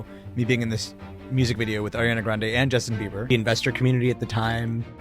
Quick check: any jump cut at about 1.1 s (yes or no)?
no